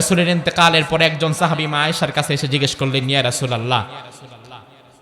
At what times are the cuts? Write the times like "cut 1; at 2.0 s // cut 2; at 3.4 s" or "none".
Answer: none